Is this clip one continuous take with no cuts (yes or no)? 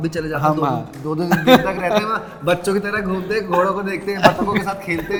yes